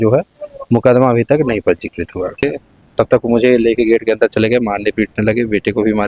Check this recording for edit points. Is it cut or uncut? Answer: cut